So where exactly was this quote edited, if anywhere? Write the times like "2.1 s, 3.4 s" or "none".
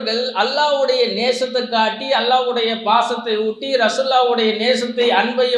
none